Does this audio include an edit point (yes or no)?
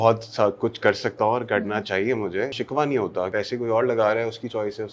yes